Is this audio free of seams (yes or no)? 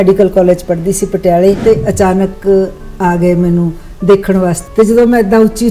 no